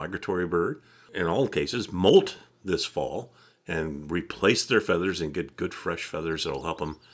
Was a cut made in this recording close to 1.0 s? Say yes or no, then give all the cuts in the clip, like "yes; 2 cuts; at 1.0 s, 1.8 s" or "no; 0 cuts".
yes; 1 cut; at 1.0 s